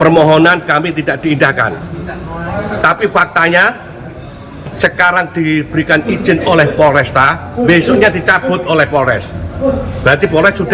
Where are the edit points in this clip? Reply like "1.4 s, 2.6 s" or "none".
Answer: none